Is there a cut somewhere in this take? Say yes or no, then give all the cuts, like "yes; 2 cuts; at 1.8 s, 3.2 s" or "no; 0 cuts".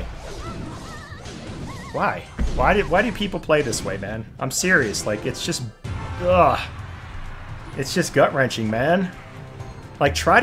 no; 0 cuts